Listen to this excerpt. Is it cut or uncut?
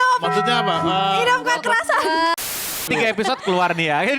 cut